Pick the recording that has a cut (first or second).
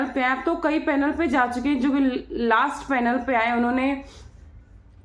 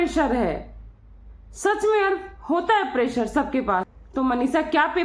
second